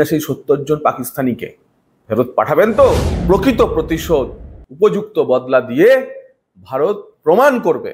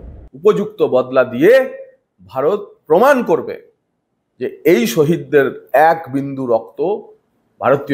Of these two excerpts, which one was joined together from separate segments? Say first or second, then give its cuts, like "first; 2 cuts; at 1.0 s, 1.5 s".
first; 1 cut; at 3.1 s